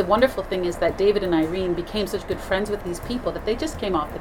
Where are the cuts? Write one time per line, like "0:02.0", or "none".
0:02.8